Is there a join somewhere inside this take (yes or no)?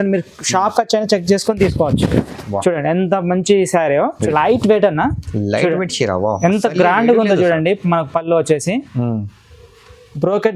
yes